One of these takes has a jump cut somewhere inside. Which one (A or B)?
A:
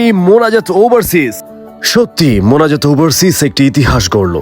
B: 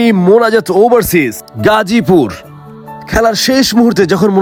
A